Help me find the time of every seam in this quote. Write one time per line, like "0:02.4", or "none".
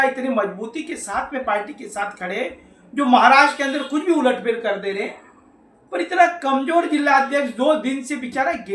none